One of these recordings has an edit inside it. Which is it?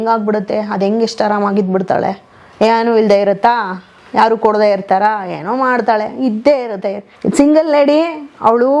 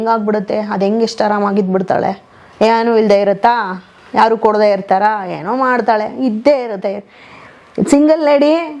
first; 1 cut; at 7.1 s

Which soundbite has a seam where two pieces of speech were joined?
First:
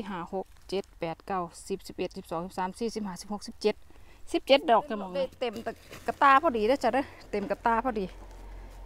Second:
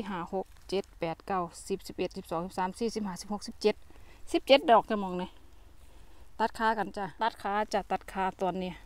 first; 1 cut; at 5.5 s

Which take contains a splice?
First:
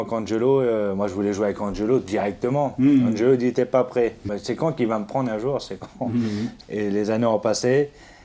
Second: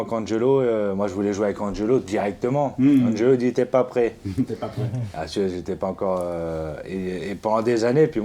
first; 2 cuts; at 4.3 s, 6.6 s

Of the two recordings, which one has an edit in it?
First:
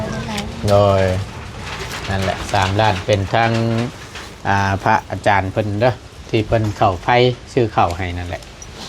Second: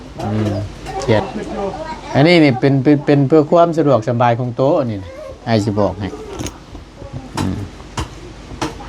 second; 1 cut; at 1.2 s

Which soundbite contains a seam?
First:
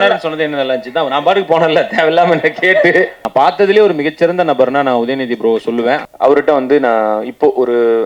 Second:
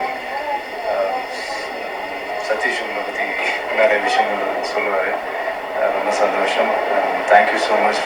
first; 2 cuts; at 3.2 s, 6.1 s

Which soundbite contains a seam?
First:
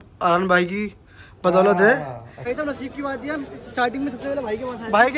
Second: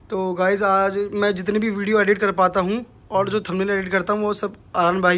first; 1 cut; at 2.5 s

